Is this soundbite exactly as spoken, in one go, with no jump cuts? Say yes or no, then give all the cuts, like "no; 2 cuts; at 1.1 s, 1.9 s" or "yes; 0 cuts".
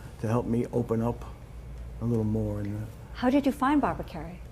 no; 1 cut; at 1.6 s